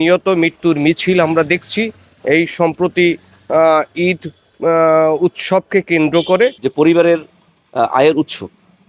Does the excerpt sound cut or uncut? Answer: cut